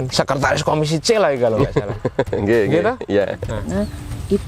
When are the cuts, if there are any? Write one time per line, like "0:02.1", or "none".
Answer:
0:03.5